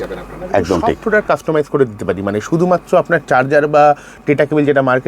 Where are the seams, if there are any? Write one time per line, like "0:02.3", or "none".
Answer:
0:01.0